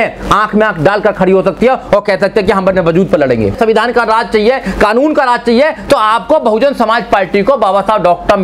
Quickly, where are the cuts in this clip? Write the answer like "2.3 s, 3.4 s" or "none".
3.5 s